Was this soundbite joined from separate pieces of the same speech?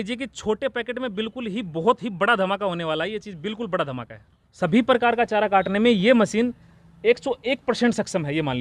yes; 1 cut; at 4.5 s

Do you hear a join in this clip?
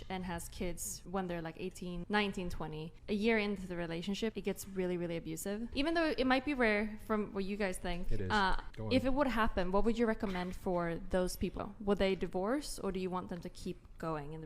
yes; 7 cuts; at 0.9 s, 2.0 s, 2.9 s, 4.4 s, 5.7 s, 8.7 s, 11.6 s

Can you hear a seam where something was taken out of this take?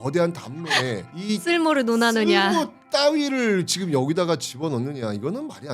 yes; 1 cut; at 1.1 s

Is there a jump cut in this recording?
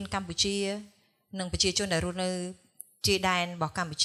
no; 0 cuts

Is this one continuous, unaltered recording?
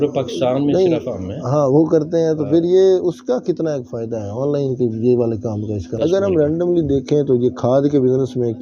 no; 1 cut; at 5.8 s

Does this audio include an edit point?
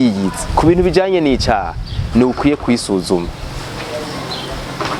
no; 0 cuts

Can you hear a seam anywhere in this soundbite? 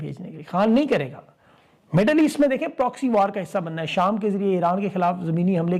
no; 0 cuts

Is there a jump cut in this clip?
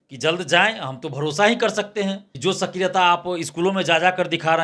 yes; 1 cut; at 2.3 s

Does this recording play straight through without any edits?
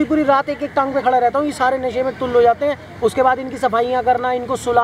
yes; 0 cuts

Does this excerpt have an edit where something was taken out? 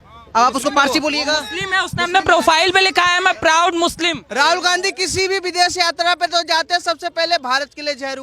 yes; 1 cut; at 4.2 s

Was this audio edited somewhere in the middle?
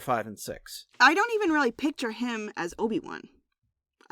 yes; 1 cut; at 0.9 s

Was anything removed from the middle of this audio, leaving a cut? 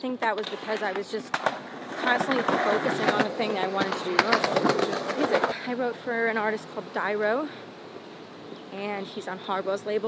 yes; 1 cut; at 5.5 s

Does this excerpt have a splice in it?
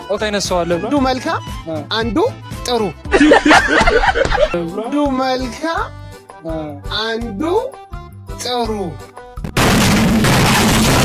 no; 0 cuts

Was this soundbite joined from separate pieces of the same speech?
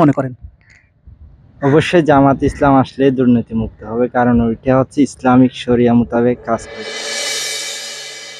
yes; 1 cut; at 6.7 s

